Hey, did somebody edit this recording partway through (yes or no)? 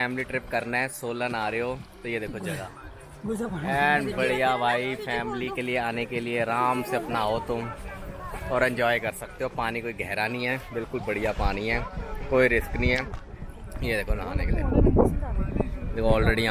no